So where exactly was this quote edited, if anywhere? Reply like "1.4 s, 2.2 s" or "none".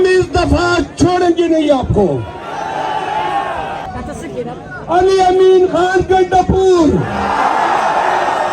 3.9 s